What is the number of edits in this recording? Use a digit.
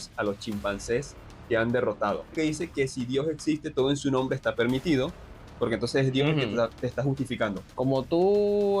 2